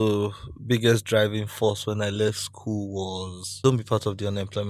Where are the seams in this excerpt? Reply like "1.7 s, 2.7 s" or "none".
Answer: 3.6 s